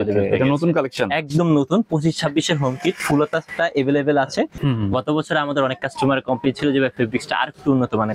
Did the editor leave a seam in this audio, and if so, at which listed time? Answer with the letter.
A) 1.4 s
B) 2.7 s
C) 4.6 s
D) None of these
C